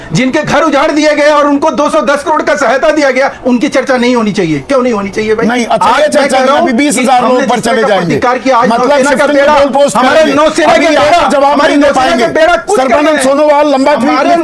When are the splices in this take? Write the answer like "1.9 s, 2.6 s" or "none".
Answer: none

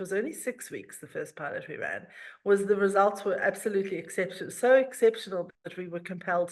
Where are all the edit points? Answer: 5.6 s

